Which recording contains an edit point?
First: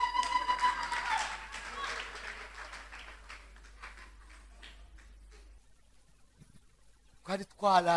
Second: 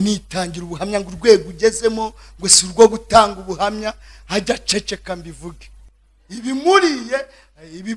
first; 1 cut; at 5.5 s

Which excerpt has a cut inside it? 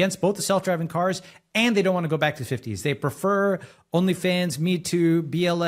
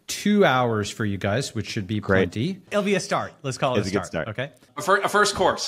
second; 2 cuts; at 2.7 s, 4.7 s

